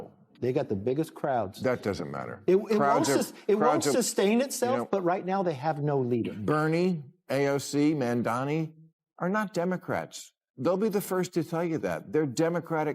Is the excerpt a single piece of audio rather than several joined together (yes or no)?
no